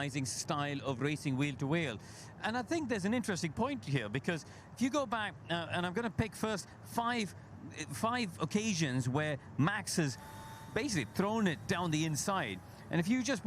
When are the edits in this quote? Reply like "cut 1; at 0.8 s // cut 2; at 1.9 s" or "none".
cut 1; at 1.4 s // cut 2; at 3.8 s // cut 3; at 9.8 s